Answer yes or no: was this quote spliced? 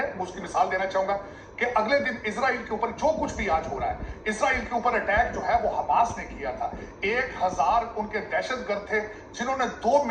no